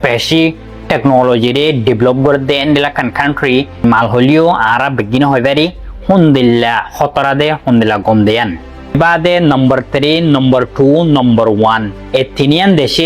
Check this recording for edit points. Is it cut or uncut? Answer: cut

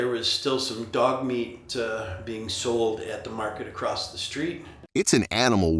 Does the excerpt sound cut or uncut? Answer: cut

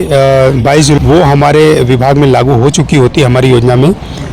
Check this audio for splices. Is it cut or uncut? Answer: cut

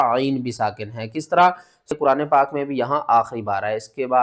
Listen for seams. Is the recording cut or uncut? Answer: cut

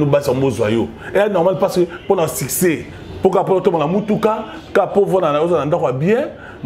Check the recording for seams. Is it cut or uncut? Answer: uncut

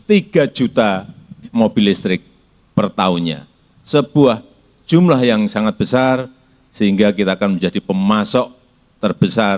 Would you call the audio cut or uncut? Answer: uncut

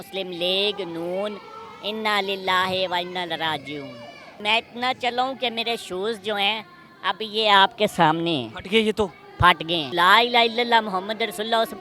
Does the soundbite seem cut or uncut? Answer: cut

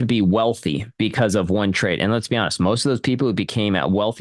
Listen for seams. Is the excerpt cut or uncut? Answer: uncut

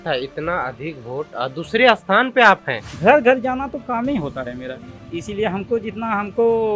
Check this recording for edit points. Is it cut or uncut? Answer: cut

